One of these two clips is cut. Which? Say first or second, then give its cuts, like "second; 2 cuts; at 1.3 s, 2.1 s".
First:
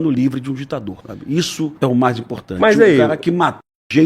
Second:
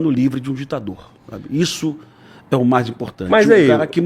first; 1 cut; at 1.4 s